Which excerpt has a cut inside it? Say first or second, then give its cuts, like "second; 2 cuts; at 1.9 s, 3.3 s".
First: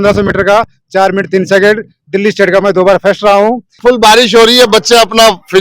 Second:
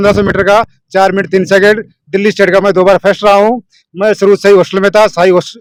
first; 1 cut; at 3.8 s